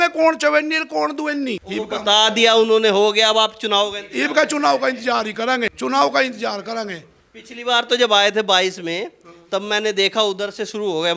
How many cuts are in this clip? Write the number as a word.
zero